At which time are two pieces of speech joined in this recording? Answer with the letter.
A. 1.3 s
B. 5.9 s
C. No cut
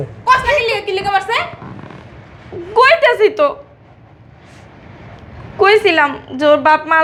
C